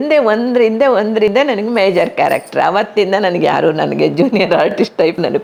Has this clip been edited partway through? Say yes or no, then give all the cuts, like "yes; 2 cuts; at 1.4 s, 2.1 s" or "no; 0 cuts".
no; 0 cuts